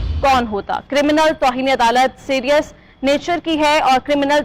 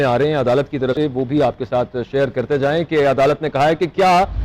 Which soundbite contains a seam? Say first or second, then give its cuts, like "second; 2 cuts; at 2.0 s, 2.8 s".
second; 1 cut; at 0.9 s